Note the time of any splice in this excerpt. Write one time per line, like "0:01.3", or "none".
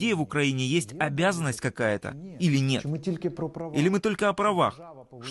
none